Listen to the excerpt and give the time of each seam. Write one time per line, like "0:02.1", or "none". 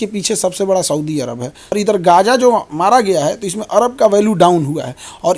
0:01.6